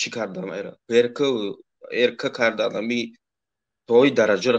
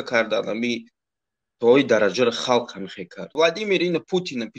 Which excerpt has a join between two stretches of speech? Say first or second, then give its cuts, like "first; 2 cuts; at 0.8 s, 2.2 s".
second; 1 cut; at 3.3 s